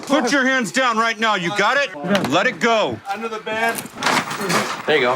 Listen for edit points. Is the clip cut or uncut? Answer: cut